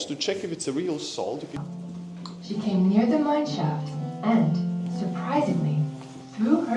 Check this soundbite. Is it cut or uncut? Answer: cut